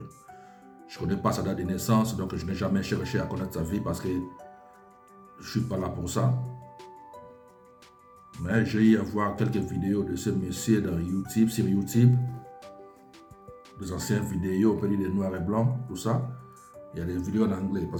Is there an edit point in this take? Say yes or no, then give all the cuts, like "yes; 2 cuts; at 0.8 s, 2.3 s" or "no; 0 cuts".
no; 0 cuts